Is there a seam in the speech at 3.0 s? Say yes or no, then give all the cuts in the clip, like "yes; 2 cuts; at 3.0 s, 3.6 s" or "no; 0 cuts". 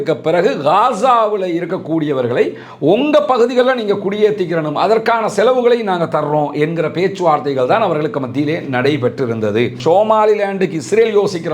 no; 1 cut; at 9.8 s